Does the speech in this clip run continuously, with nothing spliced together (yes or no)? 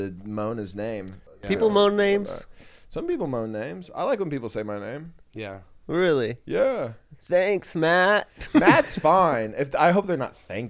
no